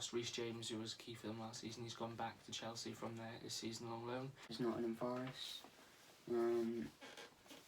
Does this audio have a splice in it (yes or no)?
yes